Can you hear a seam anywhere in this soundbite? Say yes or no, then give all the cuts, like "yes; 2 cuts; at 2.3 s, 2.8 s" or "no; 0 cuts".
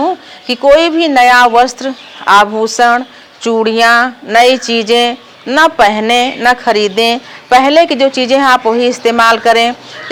no; 0 cuts